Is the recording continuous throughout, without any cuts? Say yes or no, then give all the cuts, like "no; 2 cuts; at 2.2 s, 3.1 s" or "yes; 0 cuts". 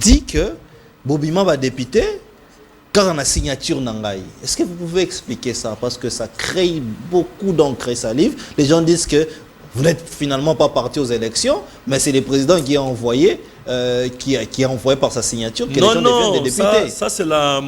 yes; 0 cuts